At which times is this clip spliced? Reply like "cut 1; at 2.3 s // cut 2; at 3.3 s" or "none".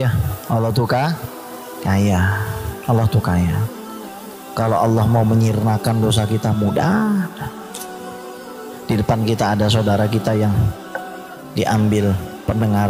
cut 1; at 7.3 s // cut 2; at 8.6 s